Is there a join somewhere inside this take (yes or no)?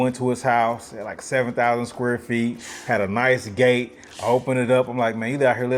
no